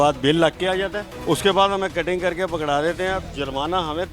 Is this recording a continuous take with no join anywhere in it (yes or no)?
no